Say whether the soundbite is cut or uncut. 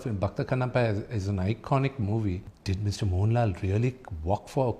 cut